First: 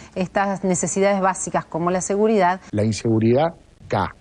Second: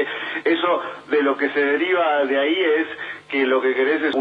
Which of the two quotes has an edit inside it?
first; 1 cut; at 2.6 s

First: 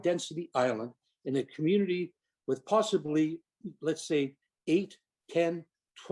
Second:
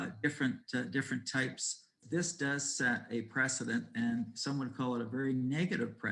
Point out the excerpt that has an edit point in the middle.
second; 1 cut; at 2.0 s

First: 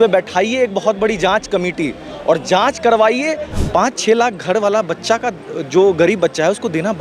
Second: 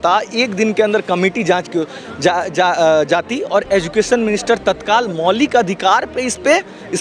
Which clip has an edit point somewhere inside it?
first; 1 cut; at 3.5 s

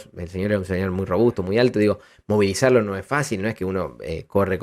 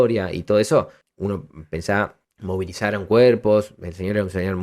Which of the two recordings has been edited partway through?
second; 2 cuts; at 1.0 s, 2.3 s

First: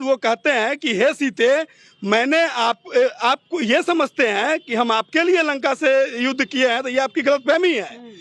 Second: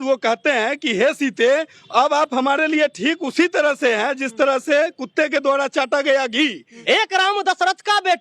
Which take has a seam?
second; 2 cuts; at 1.8 s, 6.7 s

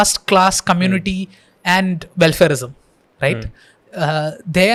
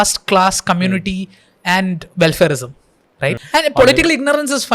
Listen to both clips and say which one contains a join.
second; 1 cut; at 3.4 s

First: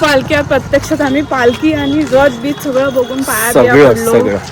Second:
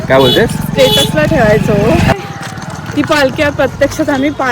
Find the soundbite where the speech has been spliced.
second; 1 cut; at 2.1 s

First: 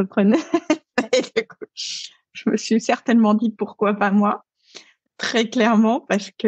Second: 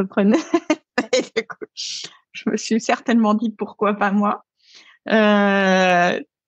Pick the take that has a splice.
first; 1 cut; at 4.9 s

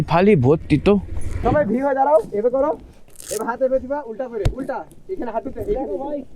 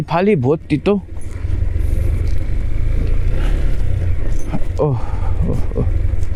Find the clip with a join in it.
first; 1 cut; at 1.4 s

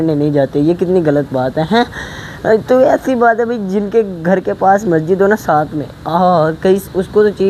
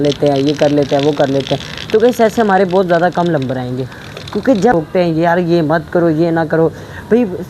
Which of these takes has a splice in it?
second; 1 cut; at 4.7 s

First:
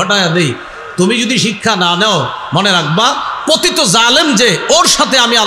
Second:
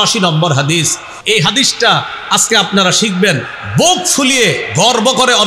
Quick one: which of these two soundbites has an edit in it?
second; 1 cut; at 1.1 s

